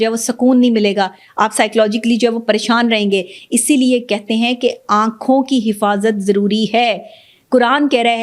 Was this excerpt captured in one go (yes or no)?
yes